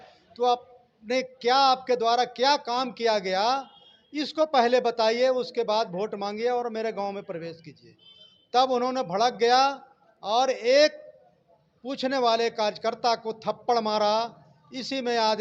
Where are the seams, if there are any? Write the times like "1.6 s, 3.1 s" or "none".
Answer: none

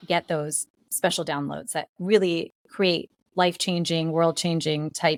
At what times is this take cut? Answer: none

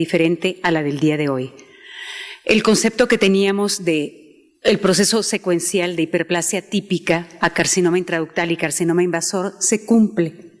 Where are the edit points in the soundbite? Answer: 7.2 s

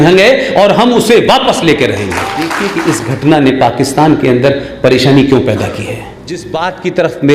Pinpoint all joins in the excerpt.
2.6 s, 6.5 s

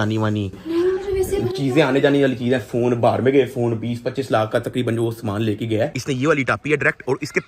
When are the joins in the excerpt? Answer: 5.9 s

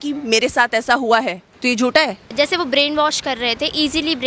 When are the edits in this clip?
1.4 s, 2.2 s

